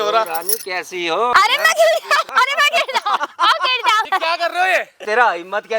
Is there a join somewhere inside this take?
yes; 5 cuts; at 1.3 s, 2.2 s, 3.2 s, 4.1 s, 5.0 s

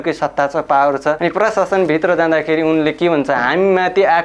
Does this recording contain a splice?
yes; 1 cut; at 1.2 s

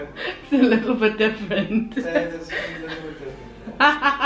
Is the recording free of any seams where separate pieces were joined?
yes; 0 cuts

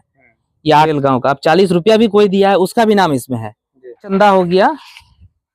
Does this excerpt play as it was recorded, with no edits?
no; 2 cuts; at 0.9 s, 4.1 s

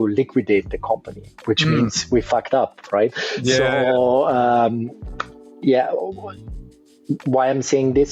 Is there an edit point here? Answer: no; 0 cuts

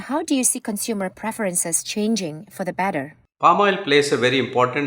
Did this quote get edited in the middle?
yes; 1 cut; at 3.2 s

